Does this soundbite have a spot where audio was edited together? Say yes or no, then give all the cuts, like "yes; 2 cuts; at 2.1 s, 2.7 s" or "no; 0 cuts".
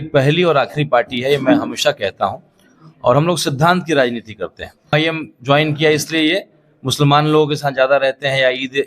yes; 1 cut; at 4.9 s